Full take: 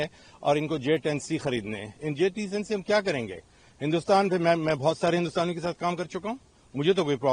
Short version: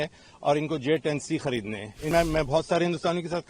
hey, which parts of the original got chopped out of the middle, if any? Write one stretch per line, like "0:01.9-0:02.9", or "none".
0:02.1-0:04.4